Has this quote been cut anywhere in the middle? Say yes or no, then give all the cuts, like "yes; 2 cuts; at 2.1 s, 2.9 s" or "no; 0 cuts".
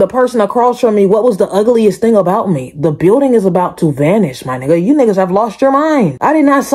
no; 0 cuts